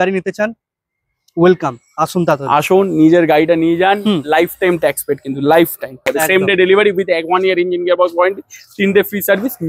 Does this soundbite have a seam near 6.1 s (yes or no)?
yes